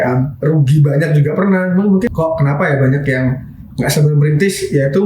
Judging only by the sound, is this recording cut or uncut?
cut